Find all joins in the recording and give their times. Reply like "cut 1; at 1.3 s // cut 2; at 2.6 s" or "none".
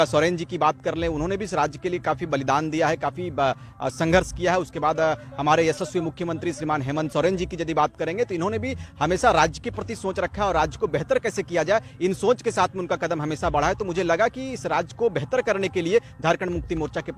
none